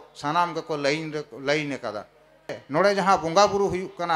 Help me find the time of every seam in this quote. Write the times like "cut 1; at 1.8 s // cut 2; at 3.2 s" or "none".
cut 1; at 2.6 s